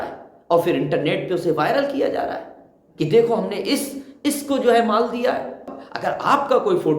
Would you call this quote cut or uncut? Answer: cut